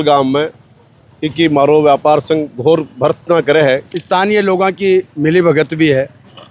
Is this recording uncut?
no; 1 cut; at 3.9 s

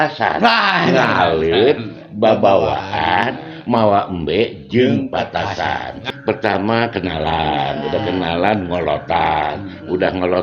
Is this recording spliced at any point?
yes; 1 cut; at 6.0 s

